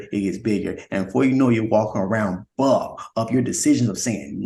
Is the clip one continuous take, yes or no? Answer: yes